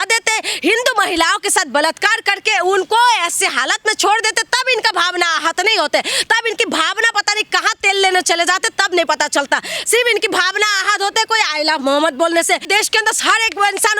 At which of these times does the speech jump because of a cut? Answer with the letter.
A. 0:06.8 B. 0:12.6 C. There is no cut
B